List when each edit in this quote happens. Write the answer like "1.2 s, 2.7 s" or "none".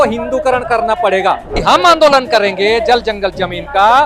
1.6 s

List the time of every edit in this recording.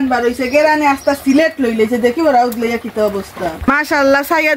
3.4 s

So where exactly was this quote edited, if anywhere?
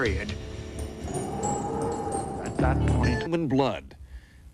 none

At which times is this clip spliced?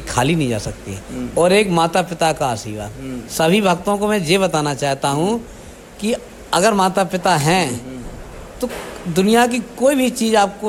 none

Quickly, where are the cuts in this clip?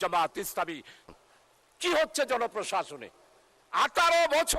1.0 s

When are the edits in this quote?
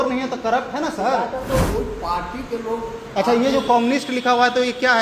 1.7 s

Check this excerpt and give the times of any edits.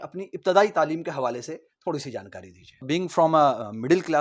2.9 s

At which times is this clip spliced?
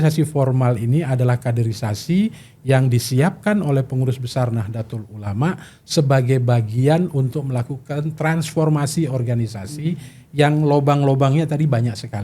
none

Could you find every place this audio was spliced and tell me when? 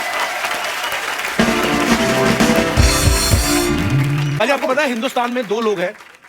4.3 s

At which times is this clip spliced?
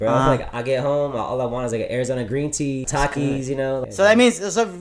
2.8 s, 3.8 s

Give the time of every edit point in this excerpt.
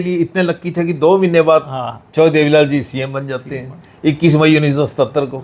none

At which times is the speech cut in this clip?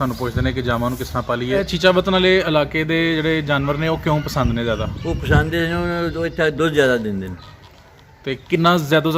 1.6 s

